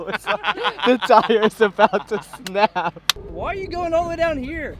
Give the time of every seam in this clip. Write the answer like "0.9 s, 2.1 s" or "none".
3.1 s